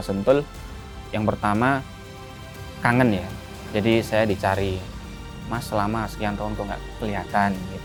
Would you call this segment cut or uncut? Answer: uncut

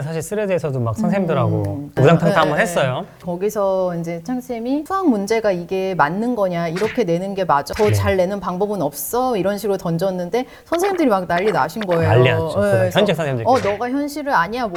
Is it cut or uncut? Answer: uncut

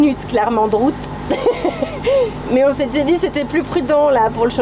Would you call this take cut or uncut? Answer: uncut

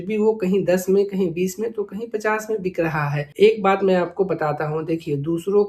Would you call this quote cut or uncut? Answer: cut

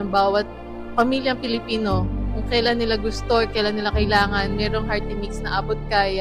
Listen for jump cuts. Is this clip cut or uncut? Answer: uncut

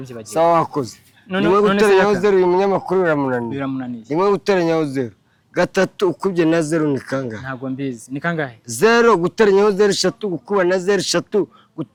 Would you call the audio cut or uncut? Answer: uncut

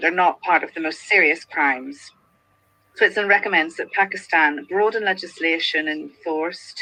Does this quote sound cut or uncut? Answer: uncut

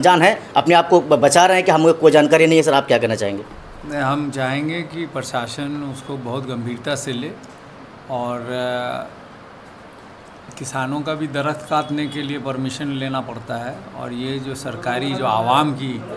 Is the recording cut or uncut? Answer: uncut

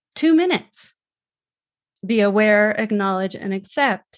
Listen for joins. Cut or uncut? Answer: cut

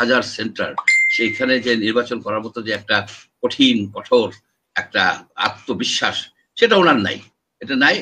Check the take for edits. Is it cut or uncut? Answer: uncut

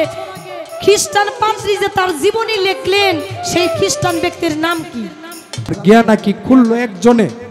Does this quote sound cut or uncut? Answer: cut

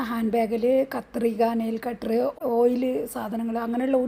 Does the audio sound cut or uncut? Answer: cut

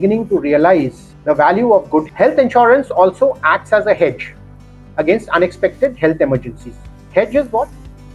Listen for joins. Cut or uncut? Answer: cut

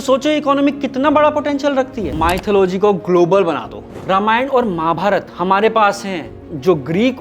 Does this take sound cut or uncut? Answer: cut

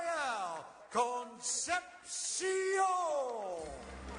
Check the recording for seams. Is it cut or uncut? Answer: cut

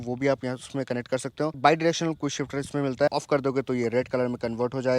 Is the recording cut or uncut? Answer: cut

